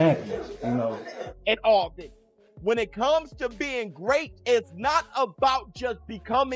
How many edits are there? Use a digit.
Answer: 1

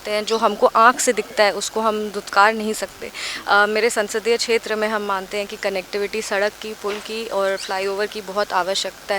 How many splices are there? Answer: 0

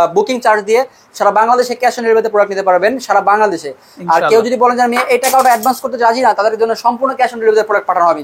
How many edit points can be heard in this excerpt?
0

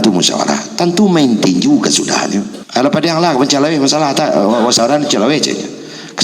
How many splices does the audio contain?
1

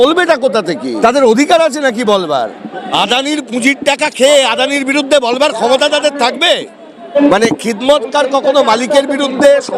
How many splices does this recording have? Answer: 3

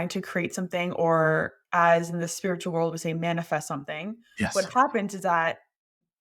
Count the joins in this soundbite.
0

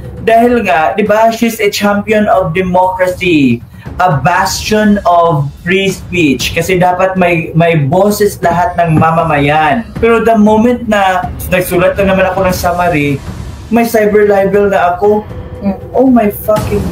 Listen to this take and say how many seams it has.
3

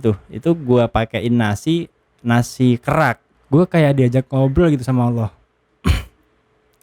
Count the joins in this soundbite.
1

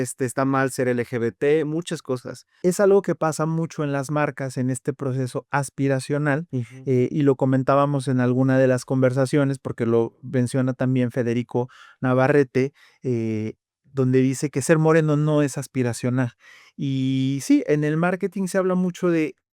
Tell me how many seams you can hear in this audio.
1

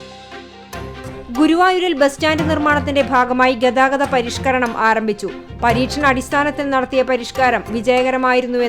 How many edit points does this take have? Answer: 1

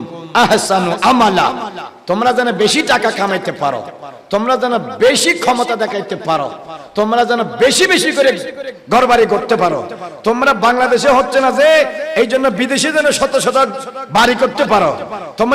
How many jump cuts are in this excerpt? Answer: 0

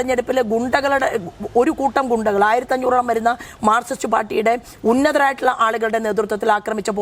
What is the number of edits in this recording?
0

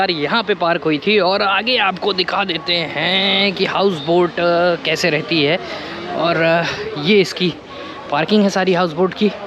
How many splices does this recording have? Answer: 0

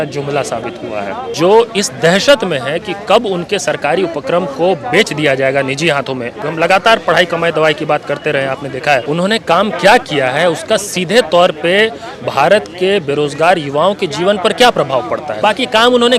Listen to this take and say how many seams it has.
4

